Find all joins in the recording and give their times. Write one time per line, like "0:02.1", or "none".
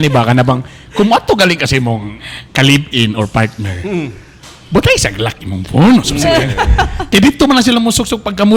none